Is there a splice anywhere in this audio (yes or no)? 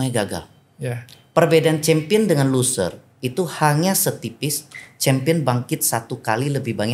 no